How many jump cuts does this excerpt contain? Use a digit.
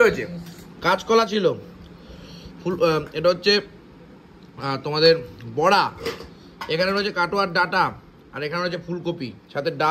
0